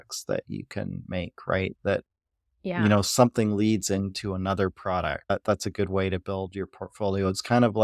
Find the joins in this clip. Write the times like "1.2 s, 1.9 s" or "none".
5.3 s